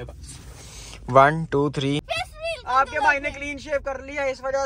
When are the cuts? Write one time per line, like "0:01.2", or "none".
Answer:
0:02.2

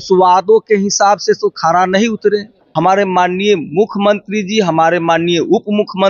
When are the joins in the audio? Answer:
0:02.6

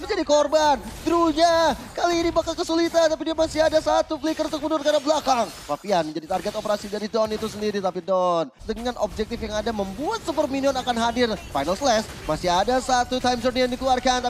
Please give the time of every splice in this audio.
0:08.7

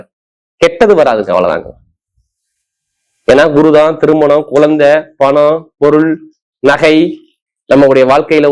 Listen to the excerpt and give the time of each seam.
none

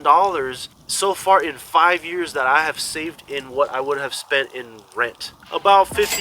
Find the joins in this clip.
0:05.3

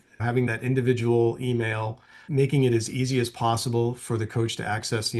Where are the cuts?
0:02.2

